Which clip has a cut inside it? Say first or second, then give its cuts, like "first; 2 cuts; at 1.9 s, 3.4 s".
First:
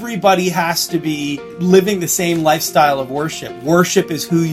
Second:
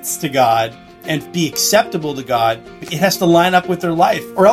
second; 2 cuts; at 1.2 s, 2.8 s